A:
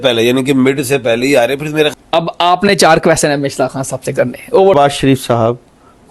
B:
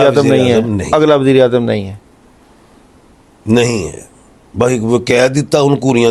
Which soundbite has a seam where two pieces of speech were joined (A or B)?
A